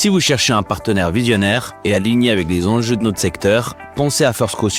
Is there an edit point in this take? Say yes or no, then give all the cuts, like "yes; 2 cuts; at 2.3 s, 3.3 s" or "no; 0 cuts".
no; 0 cuts